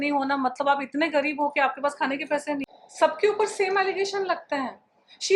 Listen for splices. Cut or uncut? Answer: uncut